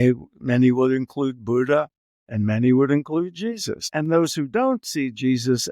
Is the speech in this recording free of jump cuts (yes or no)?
no